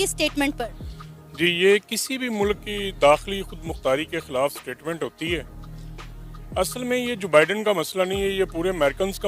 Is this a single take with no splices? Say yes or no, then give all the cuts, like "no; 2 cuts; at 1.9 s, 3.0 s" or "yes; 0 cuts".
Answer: yes; 0 cuts